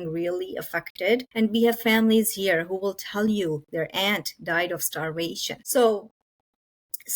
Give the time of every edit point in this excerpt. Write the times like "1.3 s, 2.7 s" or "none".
1.3 s, 5.5 s

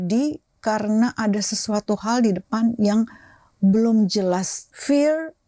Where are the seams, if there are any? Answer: 4.6 s

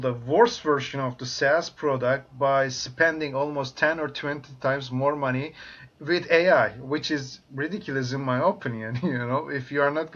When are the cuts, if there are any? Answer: none

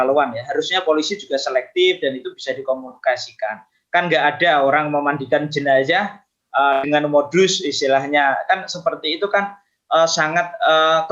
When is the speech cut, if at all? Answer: none

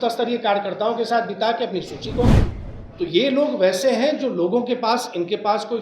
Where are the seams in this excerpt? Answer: 2.3 s

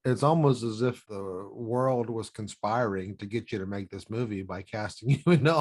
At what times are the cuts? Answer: 1.1 s

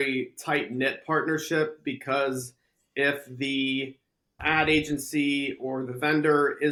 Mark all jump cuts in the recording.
none

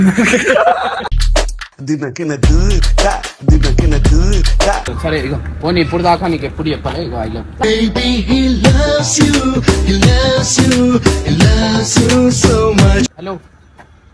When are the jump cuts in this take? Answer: 4.9 s, 13.1 s

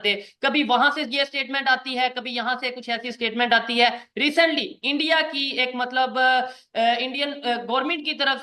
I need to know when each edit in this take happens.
none

